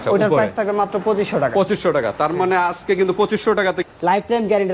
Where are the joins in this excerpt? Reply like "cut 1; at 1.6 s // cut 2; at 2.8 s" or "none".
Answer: cut 1; at 3.8 s